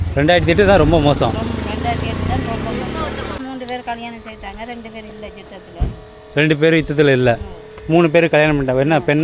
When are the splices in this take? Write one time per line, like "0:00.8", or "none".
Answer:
0:03.4